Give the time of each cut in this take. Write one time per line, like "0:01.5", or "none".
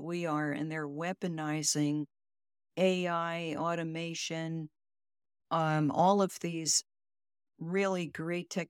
none